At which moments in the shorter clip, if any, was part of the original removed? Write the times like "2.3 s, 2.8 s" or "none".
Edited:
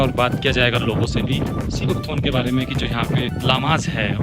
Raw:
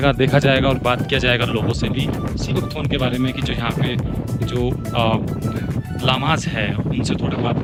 3.3 s

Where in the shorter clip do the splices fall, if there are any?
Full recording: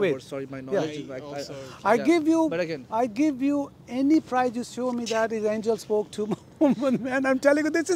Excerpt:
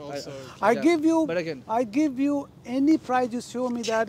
none

